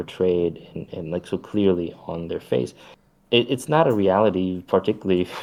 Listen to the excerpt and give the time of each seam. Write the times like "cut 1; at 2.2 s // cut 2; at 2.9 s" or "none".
none